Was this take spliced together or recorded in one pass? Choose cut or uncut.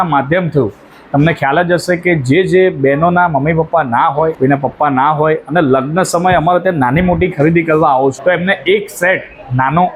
cut